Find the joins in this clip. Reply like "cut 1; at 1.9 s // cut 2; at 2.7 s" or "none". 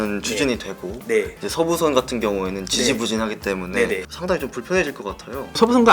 cut 1; at 4.1 s